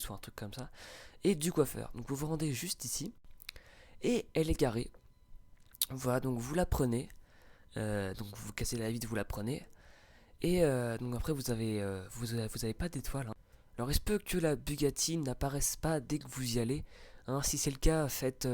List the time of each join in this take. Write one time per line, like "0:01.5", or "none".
0:04.3